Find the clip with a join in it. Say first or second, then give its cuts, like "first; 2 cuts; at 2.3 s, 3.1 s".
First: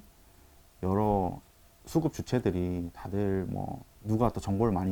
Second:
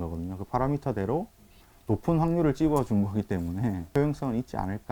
second; 1 cut; at 3.9 s